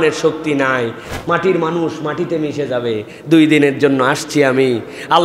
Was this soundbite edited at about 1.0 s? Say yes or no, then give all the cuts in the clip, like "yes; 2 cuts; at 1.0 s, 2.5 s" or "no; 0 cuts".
yes; 1 cut; at 1.0 s